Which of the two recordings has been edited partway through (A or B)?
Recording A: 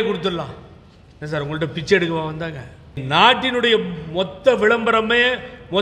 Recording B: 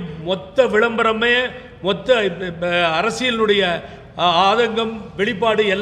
A